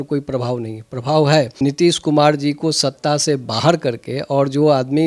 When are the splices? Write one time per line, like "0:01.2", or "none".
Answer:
0:01.5